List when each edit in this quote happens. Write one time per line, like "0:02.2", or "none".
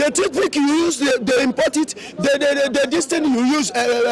none